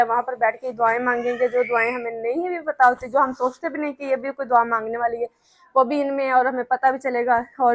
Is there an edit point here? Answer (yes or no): no